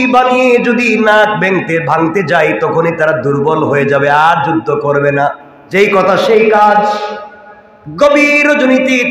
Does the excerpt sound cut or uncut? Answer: cut